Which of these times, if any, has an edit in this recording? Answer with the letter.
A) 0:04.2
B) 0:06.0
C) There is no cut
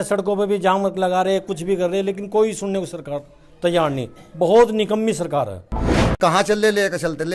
B